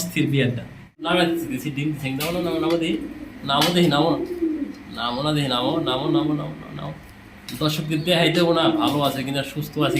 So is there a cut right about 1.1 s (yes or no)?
yes